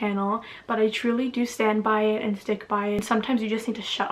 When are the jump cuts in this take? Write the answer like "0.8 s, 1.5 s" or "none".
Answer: 3.0 s